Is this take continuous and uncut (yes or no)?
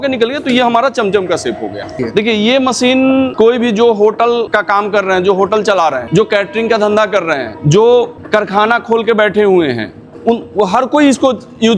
no